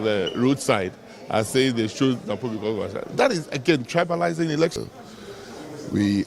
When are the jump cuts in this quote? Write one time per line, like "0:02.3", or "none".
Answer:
0:04.7